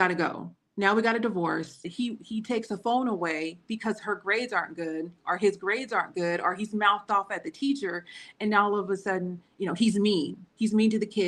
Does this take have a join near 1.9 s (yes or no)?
yes